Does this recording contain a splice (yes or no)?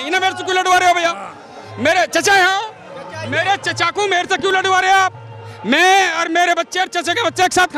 no